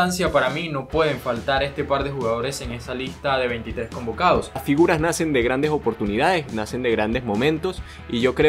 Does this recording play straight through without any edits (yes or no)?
no